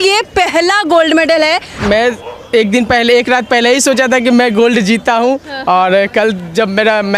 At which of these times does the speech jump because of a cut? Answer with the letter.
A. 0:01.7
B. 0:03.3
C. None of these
A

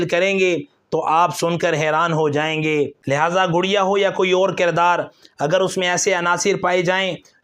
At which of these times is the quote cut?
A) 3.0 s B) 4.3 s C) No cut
A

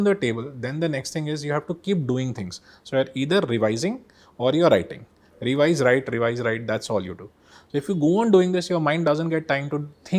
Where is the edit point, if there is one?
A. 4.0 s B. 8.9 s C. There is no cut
C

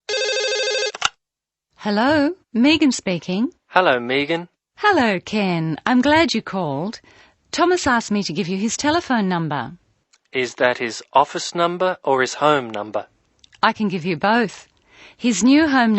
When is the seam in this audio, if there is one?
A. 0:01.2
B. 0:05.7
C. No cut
A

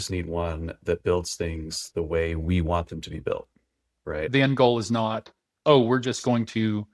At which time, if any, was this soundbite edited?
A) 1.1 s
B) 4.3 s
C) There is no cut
B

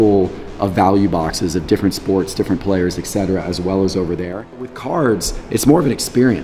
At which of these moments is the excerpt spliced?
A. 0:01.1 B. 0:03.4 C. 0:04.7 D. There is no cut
C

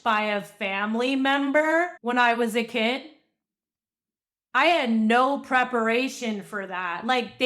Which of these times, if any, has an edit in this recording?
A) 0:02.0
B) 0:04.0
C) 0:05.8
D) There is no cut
A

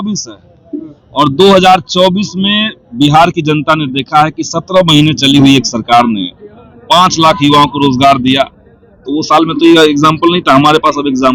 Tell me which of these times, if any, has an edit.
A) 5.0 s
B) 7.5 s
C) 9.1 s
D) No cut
D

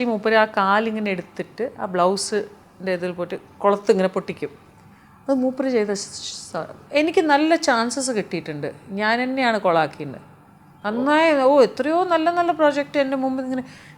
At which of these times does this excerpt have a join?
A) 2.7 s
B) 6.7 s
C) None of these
B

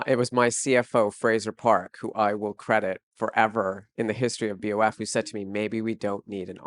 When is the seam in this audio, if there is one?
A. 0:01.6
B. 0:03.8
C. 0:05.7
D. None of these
B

